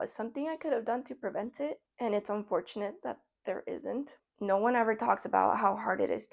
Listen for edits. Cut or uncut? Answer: cut